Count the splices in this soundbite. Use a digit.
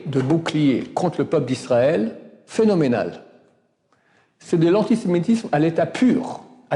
0